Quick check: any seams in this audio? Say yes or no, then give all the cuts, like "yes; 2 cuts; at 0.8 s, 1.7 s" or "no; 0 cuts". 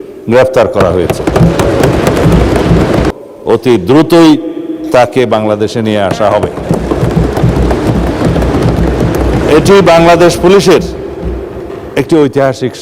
yes; 1 cut; at 3.1 s